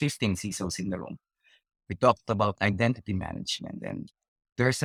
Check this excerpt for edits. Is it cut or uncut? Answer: uncut